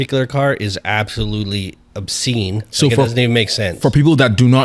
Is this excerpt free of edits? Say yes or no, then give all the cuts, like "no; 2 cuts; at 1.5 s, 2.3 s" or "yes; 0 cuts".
yes; 0 cuts